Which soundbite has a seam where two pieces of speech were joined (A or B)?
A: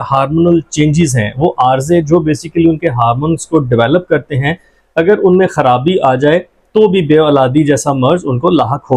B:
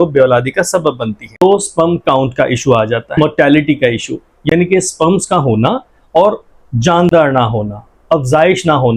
B